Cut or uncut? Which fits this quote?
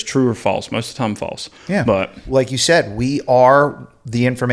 cut